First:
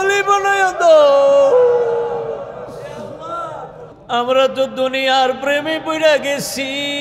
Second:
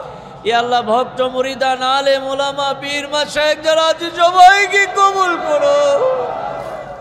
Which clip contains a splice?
first; 1 cut; at 3.9 s

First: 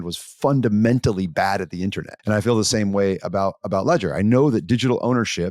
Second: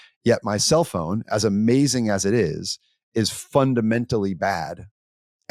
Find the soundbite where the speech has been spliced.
first; 1 cut; at 2.1 s

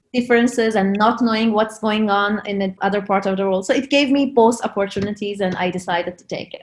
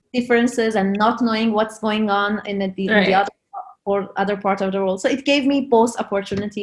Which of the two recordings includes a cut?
first; 1 cut; at 2.7 s

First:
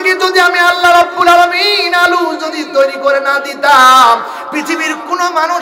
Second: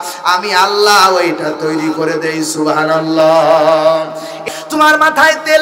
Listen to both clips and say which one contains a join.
second; 1 cut; at 4.4 s

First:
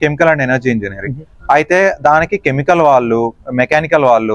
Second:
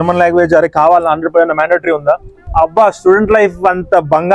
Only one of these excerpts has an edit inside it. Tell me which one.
second; 1 cut; at 2.4 s

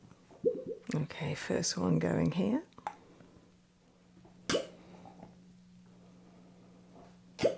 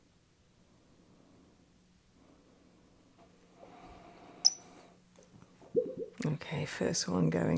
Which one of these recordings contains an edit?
second; 1 cut; at 3.2 s

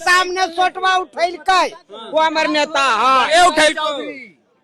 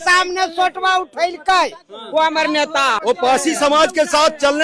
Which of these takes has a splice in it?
second; 1 cut; at 3.0 s

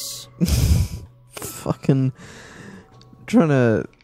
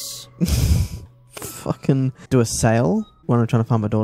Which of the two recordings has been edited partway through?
second; 2 cuts; at 2.2 s, 3.1 s

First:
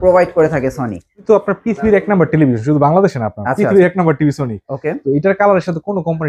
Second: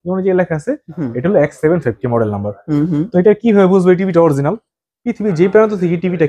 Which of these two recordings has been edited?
first; 1 cut; at 1.2 s

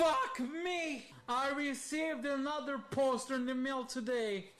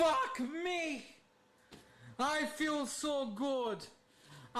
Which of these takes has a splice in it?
first; 1 cut; at 1.1 s

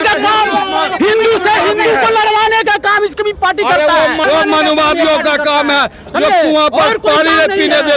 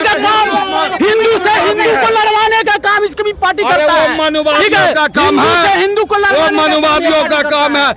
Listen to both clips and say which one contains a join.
first; 1 cut; at 4.2 s

